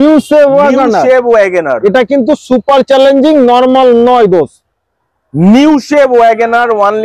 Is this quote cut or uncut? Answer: uncut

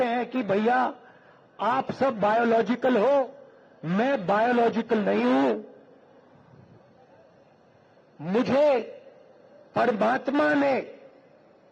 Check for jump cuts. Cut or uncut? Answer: uncut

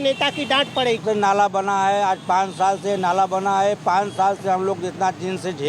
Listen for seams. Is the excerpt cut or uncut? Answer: cut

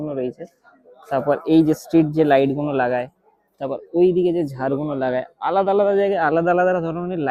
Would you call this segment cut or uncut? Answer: uncut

